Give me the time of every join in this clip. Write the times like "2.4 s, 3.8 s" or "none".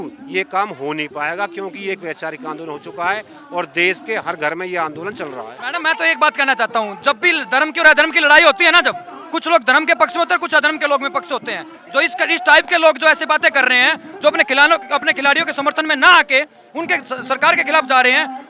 5.5 s